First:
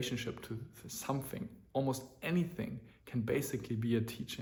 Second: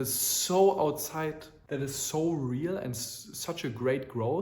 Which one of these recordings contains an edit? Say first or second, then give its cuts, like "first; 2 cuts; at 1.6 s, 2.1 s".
second; 1 cut; at 1.5 s